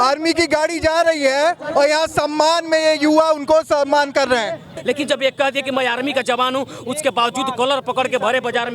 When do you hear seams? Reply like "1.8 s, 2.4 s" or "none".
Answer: 4.7 s